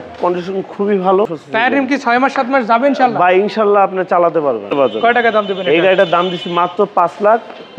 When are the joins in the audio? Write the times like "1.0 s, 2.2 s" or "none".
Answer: 1.4 s, 4.7 s